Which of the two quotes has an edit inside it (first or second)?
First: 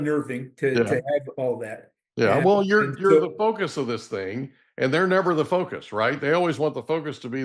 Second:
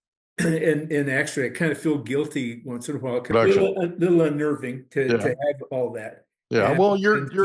second